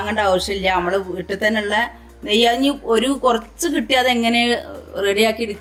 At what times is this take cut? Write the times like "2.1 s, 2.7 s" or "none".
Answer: none